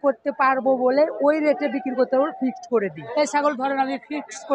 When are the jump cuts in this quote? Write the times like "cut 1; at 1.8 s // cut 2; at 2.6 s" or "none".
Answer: cut 1; at 3.0 s